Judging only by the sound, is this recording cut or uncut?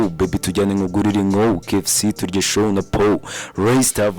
uncut